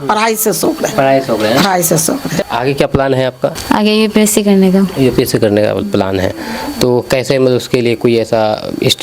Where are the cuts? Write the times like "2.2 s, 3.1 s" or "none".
2.3 s, 3.6 s